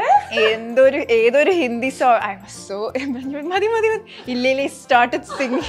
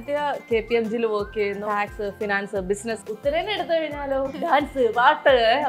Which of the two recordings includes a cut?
second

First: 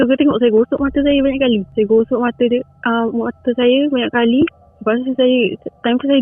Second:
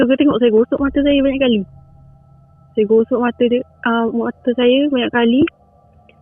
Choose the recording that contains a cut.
first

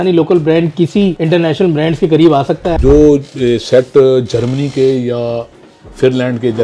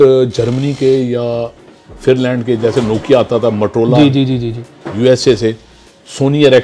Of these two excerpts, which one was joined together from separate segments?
first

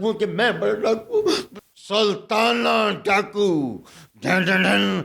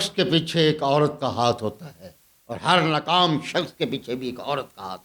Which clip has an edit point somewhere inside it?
first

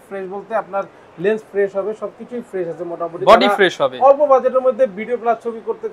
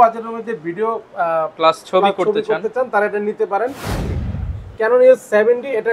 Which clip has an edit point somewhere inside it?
second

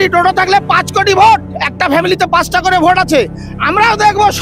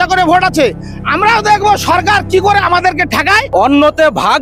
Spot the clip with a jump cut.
second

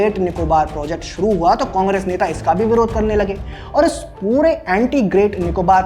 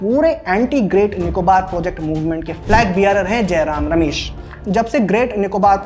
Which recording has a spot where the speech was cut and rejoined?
second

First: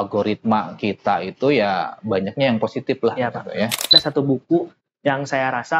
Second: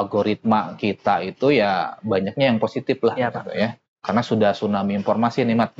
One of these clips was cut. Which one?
first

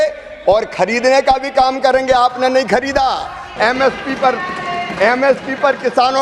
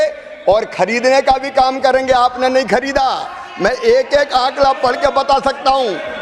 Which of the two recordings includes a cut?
first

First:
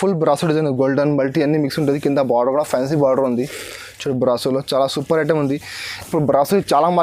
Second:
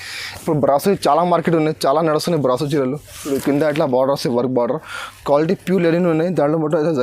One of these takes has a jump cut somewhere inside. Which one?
second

